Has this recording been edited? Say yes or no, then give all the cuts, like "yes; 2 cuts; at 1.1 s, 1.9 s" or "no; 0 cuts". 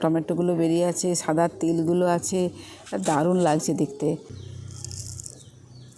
yes; 1 cut; at 4.0 s